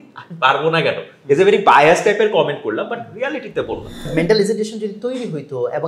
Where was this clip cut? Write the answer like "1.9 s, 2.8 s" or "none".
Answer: 4.1 s